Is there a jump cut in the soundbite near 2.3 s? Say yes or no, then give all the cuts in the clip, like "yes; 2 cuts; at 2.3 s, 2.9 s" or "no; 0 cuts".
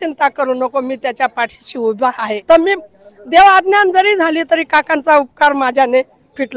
yes; 1 cut; at 2.3 s